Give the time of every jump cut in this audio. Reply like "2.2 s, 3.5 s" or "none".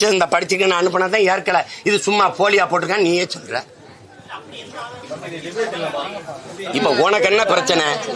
none